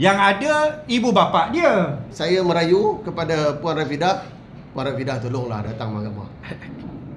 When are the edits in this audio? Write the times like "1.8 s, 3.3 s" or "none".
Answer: 2.1 s